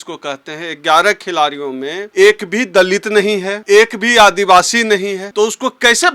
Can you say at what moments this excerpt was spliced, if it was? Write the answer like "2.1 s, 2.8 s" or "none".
2.0 s, 3.5 s, 5.2 s